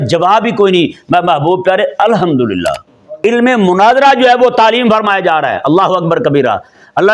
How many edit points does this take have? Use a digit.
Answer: 1